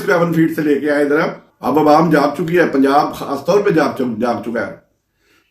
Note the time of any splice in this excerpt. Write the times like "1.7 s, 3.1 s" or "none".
1.5 s